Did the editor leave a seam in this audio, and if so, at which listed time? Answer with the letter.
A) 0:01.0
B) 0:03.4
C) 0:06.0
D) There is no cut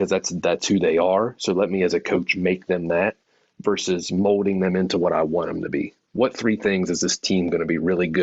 C